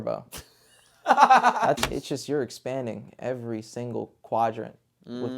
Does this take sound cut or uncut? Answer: cut